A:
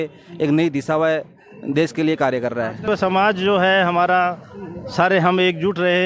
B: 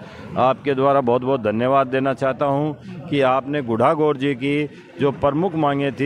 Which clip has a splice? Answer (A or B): A